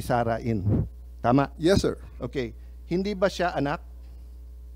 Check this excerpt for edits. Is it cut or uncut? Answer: uncut